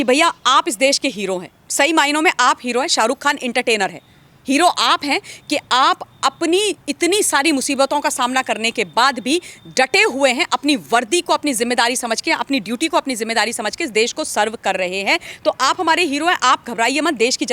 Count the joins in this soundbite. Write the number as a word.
zero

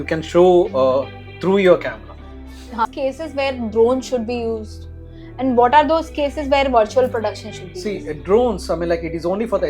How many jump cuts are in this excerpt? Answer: one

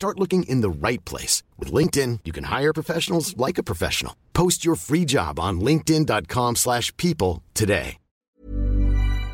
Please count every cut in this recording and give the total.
one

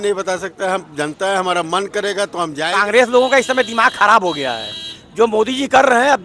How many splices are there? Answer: one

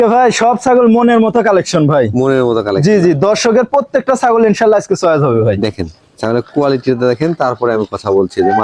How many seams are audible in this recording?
zero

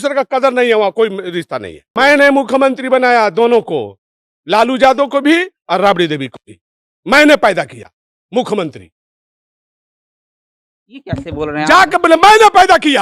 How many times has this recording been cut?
one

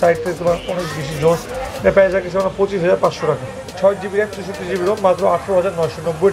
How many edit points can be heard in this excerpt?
one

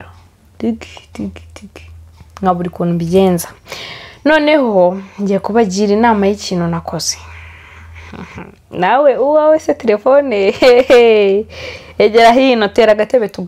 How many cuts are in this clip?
zero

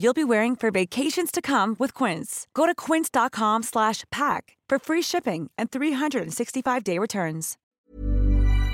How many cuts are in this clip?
one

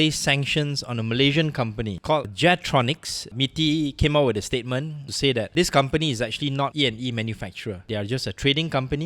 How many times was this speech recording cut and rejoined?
three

